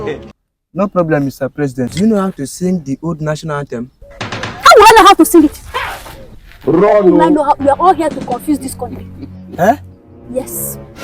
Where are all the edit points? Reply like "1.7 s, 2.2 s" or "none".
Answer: 1.8 s